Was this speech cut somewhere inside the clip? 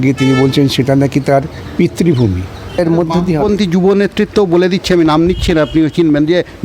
yes; 1 cut; at 2.8 s

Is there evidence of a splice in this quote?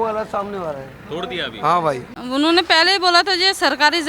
yes; 1 cut; at 2.1 s

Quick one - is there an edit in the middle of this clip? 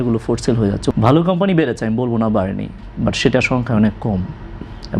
yes; 1 cut; at 0.9 s

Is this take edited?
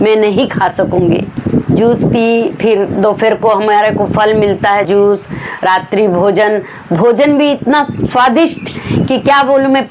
yes; 2 cuts; at 1.3 s, 4.9 s

